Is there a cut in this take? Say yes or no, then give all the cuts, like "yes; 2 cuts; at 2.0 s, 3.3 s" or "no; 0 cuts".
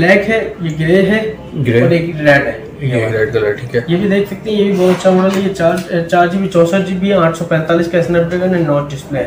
no; 0 cuts